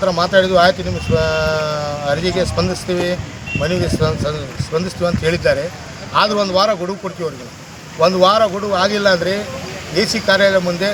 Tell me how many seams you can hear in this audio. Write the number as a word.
zero